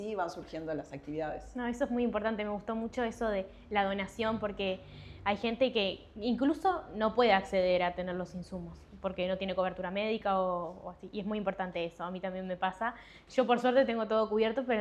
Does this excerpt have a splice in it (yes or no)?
no